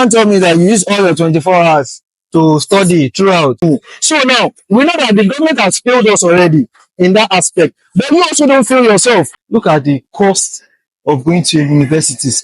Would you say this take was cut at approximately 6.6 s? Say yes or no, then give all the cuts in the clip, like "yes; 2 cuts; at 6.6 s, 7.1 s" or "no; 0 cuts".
no; 2 cuts; at 3.6 s, 9.4 s